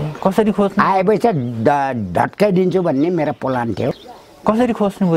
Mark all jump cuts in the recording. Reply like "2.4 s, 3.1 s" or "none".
4.0 s